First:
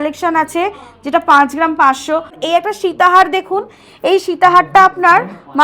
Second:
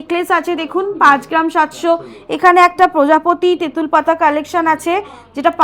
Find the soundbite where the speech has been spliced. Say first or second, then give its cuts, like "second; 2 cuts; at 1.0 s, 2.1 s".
first; 1 cut; at 2.4 s